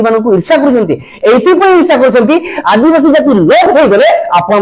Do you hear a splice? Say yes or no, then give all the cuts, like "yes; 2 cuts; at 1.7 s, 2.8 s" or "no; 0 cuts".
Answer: no; 0 cuts